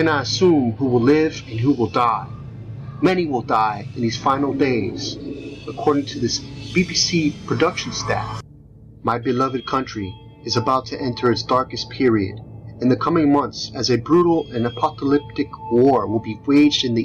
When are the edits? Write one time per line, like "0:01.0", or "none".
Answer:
none